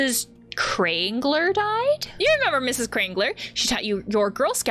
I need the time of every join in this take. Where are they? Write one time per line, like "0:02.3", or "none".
0:02.1